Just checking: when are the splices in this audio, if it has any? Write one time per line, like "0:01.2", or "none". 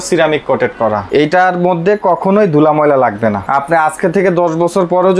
0:01.0
0:03.5